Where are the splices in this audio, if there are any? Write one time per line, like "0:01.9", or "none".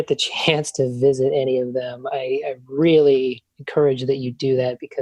none